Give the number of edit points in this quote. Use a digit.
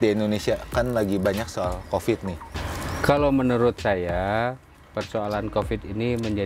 1